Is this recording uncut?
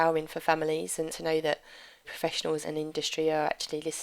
no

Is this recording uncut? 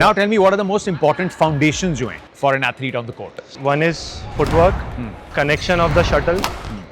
no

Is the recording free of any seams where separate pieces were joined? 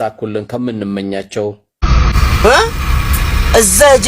no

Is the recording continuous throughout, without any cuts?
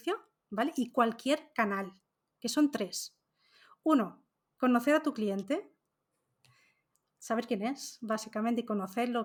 yes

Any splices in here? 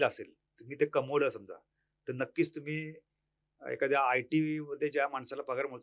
no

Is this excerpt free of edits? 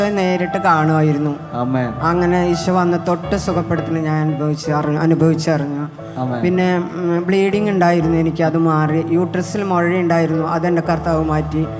yes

